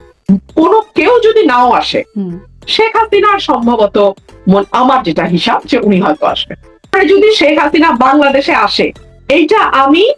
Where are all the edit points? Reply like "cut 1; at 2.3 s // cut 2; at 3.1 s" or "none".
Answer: cut 1; at 6.9 s